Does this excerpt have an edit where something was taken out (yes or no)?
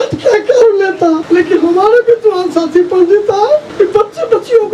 yes